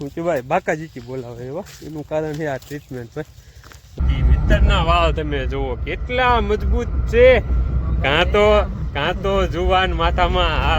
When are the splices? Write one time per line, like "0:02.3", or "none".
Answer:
0:04.0